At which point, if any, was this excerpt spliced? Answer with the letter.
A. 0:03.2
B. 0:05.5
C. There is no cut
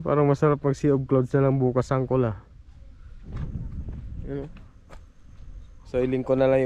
A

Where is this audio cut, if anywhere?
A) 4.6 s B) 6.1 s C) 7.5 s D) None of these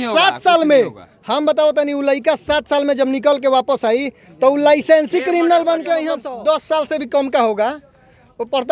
B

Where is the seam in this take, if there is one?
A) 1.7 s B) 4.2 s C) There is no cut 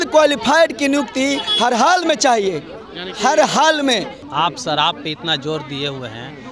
B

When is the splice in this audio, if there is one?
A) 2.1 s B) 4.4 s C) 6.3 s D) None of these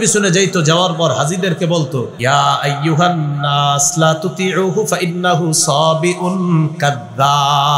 A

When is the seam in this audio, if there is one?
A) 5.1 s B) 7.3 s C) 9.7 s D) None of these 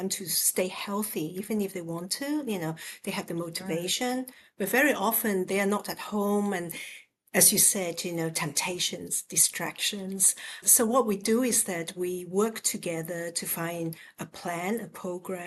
D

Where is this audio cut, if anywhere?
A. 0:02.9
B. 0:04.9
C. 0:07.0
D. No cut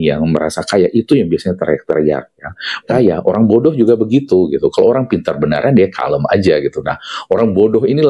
A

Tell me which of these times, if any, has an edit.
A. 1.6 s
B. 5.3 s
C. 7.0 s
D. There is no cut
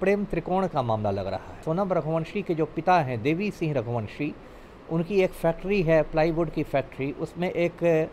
A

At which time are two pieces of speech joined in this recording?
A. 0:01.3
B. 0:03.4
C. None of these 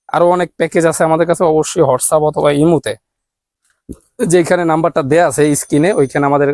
C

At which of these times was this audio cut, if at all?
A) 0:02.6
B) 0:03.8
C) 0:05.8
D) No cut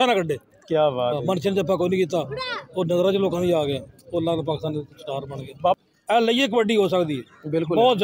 C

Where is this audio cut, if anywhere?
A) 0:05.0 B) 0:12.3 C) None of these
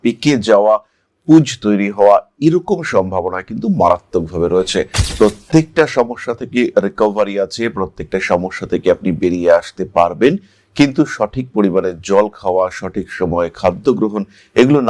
A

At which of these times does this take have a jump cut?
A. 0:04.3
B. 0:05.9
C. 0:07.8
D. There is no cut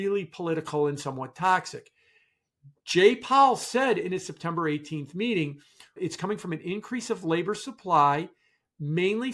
B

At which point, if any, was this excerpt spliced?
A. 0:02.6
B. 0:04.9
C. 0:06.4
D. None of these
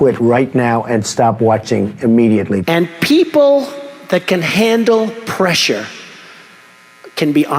A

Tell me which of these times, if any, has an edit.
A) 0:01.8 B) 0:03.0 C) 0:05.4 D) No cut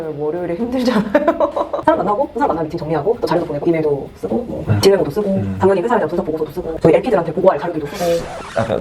A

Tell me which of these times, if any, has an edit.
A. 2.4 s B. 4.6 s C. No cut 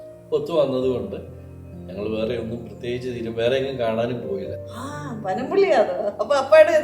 B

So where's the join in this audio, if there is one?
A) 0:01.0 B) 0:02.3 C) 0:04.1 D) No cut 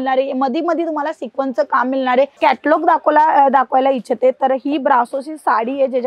B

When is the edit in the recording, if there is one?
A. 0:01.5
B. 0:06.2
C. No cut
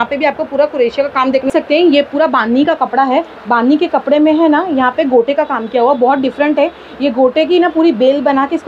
A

